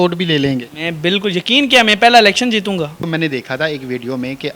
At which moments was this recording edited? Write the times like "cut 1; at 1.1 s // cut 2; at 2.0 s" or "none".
cut 1; at 3.0 s